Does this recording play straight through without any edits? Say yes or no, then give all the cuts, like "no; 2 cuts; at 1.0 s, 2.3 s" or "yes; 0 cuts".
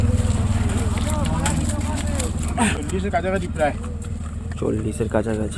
no; 1 cut; at 2.8 s